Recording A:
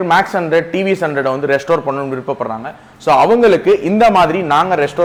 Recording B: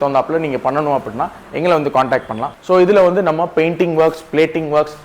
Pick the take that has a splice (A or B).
B